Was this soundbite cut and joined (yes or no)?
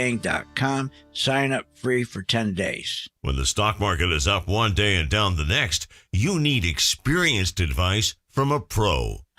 yes